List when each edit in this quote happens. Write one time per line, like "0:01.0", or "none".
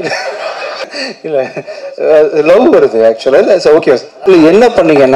0:00.8
0:04.1